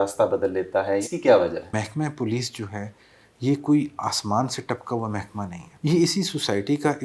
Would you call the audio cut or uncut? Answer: cut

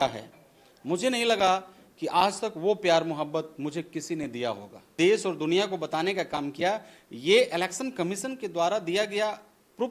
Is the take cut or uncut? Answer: cut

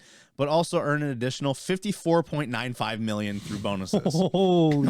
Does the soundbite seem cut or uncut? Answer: uncut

